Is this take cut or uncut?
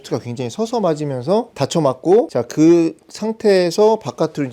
cut